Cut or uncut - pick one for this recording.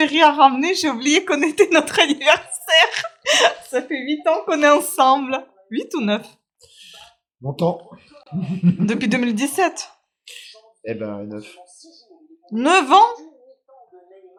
uncut